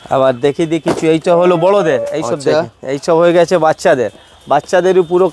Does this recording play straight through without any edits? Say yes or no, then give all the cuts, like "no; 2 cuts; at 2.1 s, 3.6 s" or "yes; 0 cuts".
yes; 0 cuts